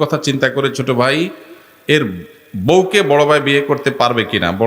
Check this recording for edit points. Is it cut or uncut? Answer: uncut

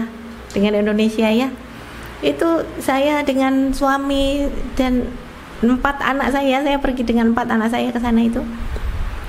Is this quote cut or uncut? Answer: uncut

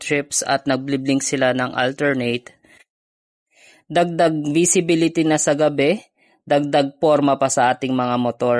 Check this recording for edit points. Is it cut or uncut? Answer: uncut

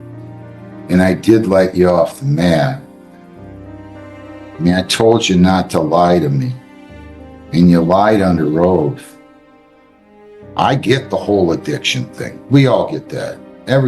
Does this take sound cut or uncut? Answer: cut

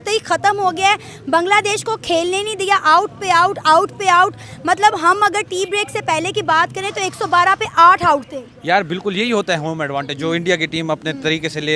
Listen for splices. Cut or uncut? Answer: uncut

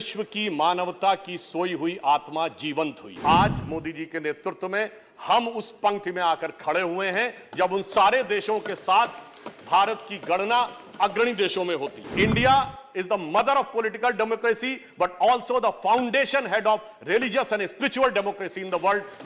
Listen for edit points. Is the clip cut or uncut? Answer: cut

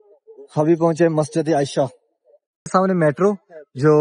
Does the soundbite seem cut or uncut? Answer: cut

